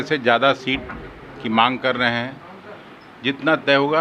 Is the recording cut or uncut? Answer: uncut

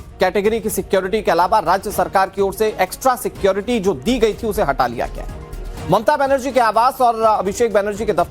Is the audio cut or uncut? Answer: uncut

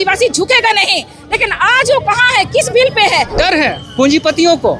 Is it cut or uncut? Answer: cut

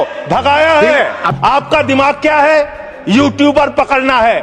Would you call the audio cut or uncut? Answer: cut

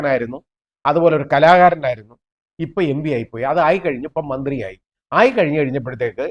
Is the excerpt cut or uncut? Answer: uncut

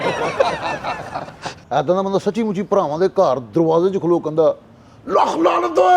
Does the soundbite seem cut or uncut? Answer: cut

